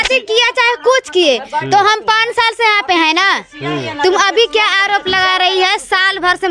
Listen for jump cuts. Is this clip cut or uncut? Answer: uncut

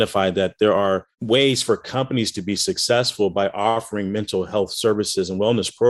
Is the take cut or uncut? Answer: cut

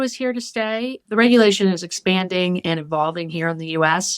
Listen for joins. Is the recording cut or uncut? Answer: cut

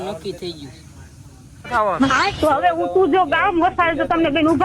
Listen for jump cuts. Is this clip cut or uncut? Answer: uncut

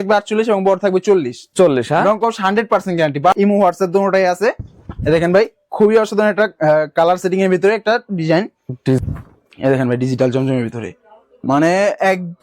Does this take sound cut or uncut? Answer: cut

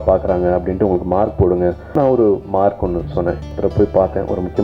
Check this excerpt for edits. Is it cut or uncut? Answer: cut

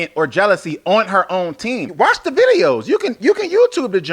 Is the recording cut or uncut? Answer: cut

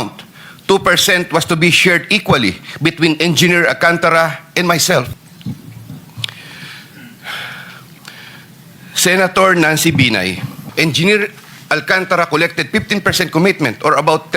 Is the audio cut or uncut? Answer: cut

